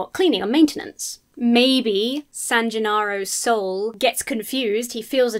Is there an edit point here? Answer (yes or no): yes